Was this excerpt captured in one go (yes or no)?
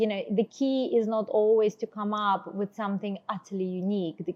yes